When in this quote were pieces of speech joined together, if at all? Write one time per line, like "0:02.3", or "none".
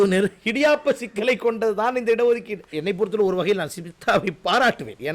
0:02.7